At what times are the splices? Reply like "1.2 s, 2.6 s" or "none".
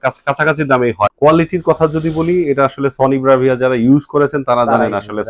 1.1 s